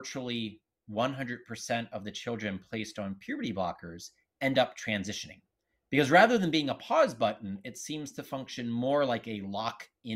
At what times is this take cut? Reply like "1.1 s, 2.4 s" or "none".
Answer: none